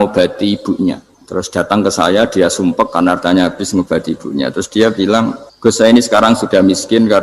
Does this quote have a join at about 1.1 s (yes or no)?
yes